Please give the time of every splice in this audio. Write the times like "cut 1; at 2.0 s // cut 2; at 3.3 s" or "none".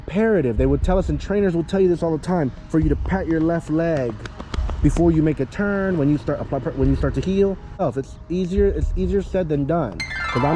cut 1; at 7.8 s